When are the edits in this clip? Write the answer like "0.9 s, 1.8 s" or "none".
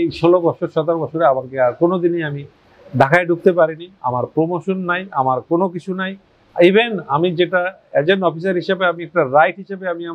none